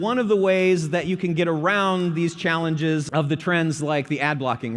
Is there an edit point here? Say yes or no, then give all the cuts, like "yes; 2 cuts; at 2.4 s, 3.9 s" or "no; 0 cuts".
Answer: yes; 1 cut; at 3.1 s